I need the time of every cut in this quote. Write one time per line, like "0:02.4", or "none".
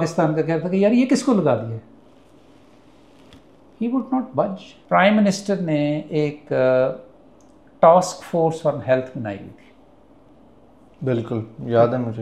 0:04.7